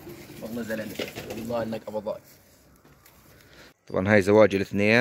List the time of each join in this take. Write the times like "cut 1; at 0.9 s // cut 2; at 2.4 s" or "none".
cut 1; at 3.7 s